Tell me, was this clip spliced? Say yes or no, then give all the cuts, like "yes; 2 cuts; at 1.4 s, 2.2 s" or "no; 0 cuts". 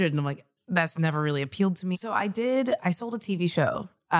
yes; 1 cut; at 1.9 s